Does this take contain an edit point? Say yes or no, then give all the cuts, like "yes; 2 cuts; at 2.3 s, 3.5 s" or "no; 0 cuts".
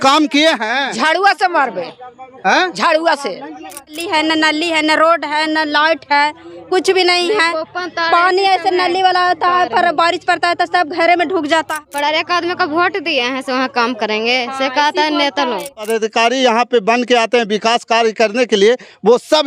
yes; 3 cuts; at 3.9 s, 11.8 s, 15.9 s